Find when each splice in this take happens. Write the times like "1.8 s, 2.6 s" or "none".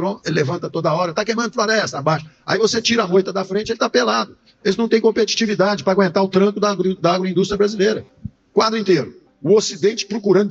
8.1 s